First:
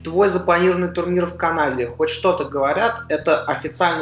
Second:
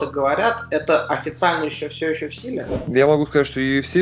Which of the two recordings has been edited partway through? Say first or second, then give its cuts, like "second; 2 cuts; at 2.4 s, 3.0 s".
second; 1 cut; at 2.7 s